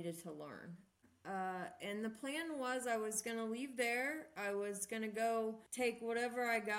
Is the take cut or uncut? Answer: cut